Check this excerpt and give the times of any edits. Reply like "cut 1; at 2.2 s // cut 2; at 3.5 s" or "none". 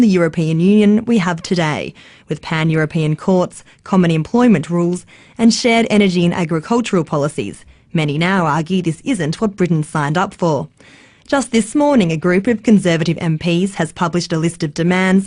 cut 1; at 1.0 s